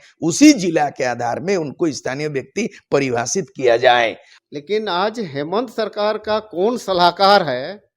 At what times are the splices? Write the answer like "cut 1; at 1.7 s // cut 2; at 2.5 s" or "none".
cut 1; at 4.3 s

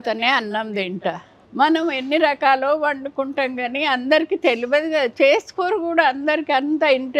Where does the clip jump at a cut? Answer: cut 1; at 1.3 s

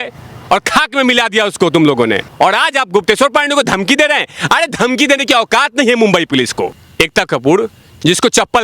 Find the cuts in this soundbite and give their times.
cut 1; at 2.3 s // cut 2; at 6.8 s

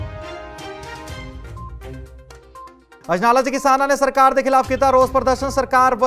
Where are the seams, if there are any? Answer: none

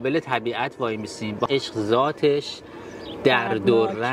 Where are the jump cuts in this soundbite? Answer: cut 1; at 1.5 s

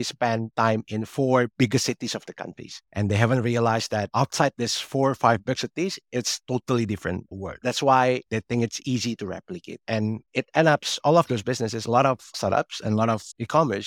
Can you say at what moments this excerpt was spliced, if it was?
cut 1; at 7.6 s // cut 2; at 8.2 s // cut 3; at 10.2 s

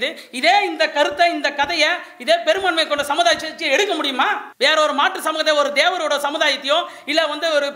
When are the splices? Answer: cut 1; at 4.5 s

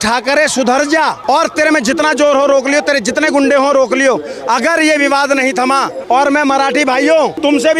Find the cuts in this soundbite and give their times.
cut 1; at 1.2 s // cut 2; at 6.0 s

